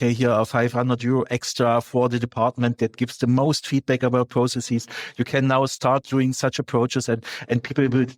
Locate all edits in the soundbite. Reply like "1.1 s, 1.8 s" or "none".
none

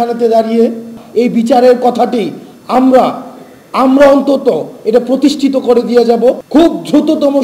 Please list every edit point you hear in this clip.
1.0 s, 6.4 s

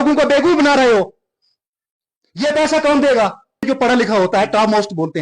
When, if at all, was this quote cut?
3.6 s

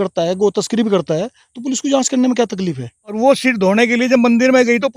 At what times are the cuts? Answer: 3.2 s

